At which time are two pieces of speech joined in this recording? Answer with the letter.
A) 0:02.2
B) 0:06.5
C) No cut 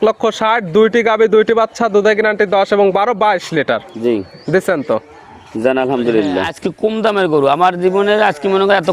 B